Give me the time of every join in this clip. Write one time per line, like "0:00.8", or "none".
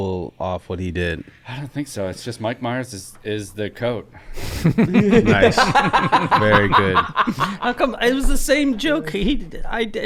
none